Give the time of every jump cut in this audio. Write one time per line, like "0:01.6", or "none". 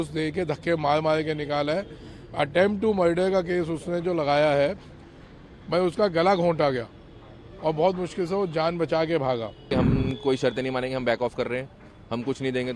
0:09.7